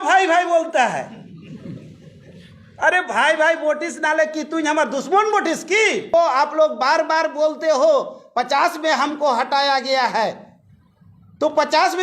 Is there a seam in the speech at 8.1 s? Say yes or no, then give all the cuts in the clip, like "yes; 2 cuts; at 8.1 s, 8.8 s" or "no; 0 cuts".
no; 1 cut; at 6.1 s